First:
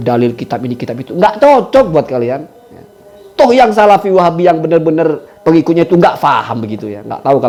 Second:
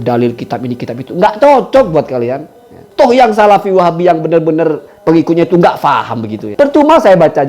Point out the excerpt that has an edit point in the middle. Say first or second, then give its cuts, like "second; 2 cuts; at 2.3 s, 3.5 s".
second; 2 cuts; at 3.1 s, 6.5 s